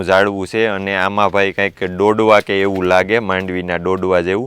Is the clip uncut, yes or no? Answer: yes